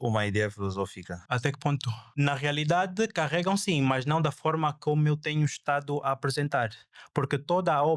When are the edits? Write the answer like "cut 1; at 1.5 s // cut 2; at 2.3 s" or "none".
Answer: cut 1; at 1.1 s // cut 2; at 2.0 s

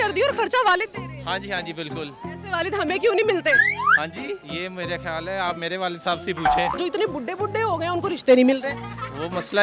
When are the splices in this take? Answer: cut 1; at 4.5 s // cut 2; at 6.8 s

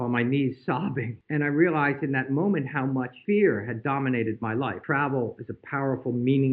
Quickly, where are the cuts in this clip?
cut 1; at 1.1 s // cut 2; at 3.1 s // cut 3; at 4.8 s

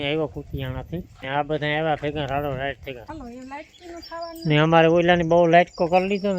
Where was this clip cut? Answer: cut 1; at 1.1 s // cut 2; at 3.0 s

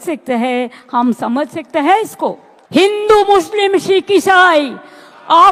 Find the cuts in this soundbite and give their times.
none

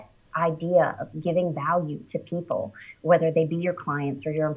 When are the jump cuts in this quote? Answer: none

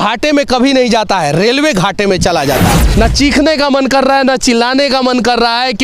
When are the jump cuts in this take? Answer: cut 1; at 2.8 s

